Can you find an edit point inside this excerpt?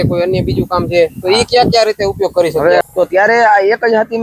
yes; 1 cut; at 2.8 s

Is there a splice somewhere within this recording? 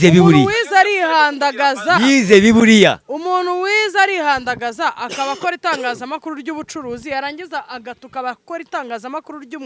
no; 0 cuts

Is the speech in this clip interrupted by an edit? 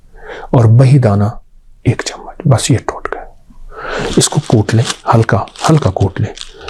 no; 0 cuts

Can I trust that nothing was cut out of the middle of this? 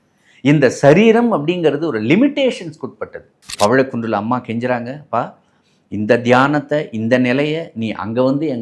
no; 1 cut; at 3.5 s

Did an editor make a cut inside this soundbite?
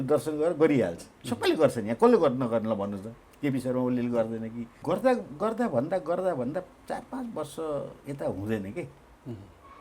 yes; 1 cut; at 4.7 s

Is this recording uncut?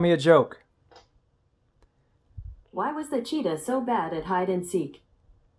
yes; 0 cuts

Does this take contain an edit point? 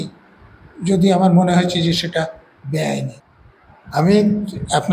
yes; 1 cut; at 3.2 s

